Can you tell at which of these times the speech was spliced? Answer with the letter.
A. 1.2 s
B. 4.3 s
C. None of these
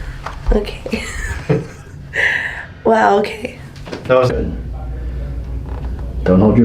B